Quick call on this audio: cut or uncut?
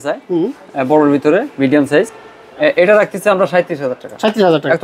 uncut